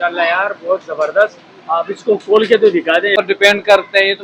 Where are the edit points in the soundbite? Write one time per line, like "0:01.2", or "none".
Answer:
0:03.2